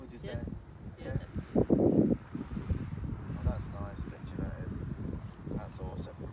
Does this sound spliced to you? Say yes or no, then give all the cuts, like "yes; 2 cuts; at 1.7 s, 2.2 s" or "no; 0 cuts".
no; 0 cuts